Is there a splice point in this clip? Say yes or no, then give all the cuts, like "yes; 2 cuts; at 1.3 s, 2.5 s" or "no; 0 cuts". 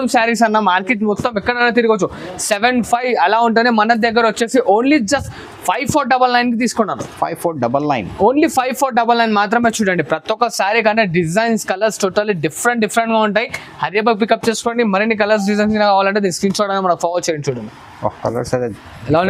no; 0 cuts